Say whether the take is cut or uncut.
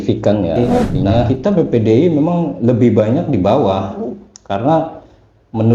cut